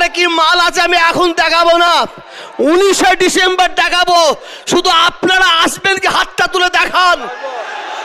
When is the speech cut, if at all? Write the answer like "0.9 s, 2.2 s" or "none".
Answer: none